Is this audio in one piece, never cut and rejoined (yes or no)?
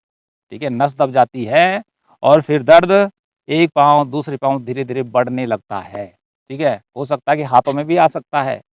yes